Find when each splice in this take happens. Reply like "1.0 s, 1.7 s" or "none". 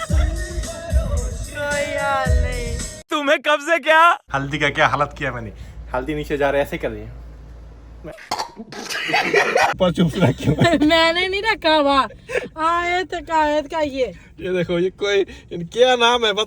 4.2 s, 9.7 s